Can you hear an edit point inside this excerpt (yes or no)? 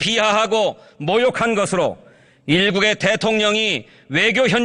no